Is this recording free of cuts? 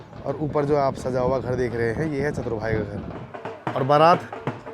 no; 1 cut; at 3.2 s

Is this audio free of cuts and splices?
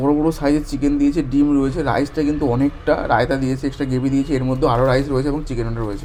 yes; 0 cuts

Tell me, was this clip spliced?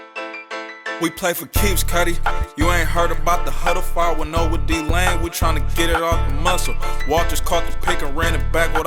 yes; 1 cut; at 1.0 s

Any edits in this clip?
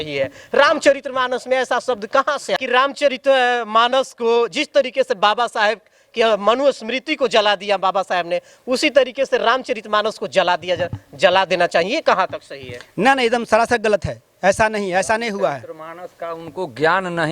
yes; 1 cut; at 2.6 s

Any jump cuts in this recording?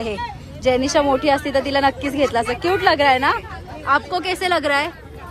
no; 0 cuts

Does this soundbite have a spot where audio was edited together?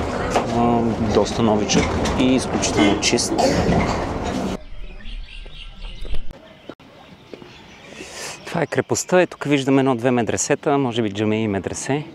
yes; 1 cut; at 4.5 s

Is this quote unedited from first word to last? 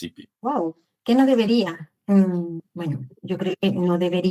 yes; 0 cuts

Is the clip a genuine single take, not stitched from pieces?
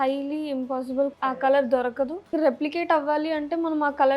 no; 2 cuts; at 1.1 s, 2.3 s

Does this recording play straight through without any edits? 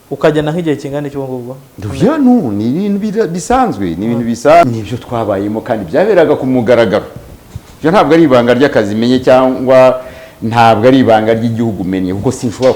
no; 1 cut; at 4.6 s

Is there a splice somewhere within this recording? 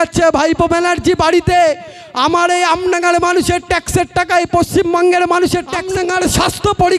yes; 1 cut; at 5.9 s

